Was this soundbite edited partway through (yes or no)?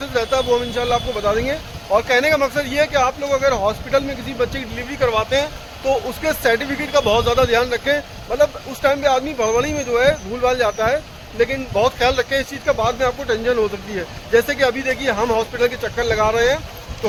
no